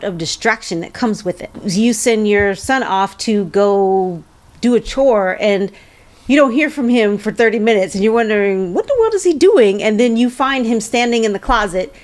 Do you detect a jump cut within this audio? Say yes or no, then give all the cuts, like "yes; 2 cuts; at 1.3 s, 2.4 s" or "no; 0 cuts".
yes; 1 cut; at 1.6 s